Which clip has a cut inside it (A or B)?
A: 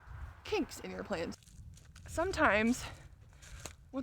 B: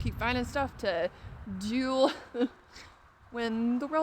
A